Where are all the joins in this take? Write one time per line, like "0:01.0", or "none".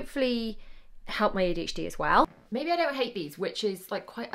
0:02.4